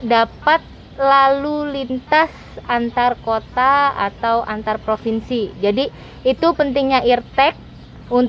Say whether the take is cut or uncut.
uncut